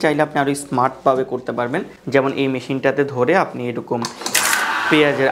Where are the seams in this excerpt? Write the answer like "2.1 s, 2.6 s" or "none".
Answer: none